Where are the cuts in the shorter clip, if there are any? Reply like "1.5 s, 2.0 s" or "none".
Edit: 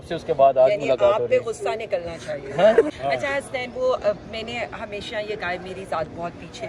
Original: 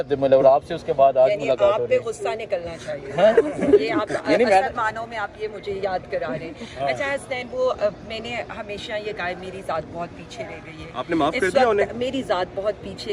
2.9 s